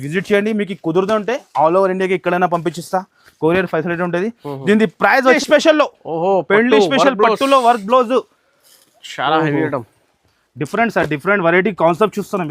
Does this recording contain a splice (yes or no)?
yes